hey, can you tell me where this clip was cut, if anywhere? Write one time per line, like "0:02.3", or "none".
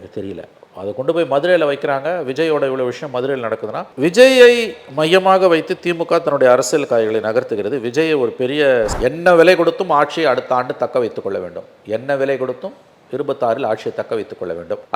0:08.9